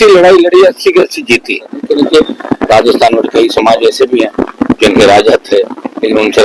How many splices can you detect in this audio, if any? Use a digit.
1